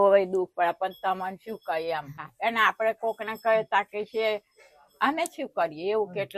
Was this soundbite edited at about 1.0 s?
no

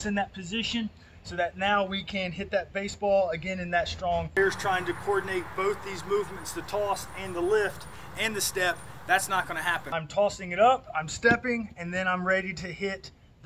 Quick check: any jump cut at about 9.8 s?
yes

